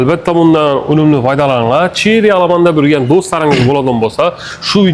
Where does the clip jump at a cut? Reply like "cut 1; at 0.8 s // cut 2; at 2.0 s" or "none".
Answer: none